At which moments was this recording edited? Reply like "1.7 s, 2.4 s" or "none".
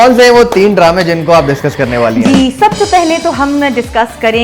none